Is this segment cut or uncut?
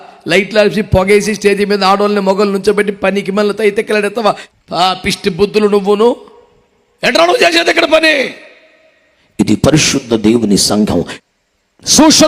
cut